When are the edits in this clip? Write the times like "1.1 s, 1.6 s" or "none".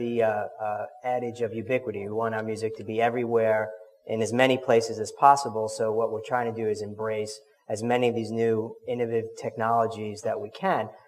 6.0 s